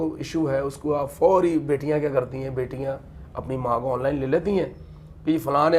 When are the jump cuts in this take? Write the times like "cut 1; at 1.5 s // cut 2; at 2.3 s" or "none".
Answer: none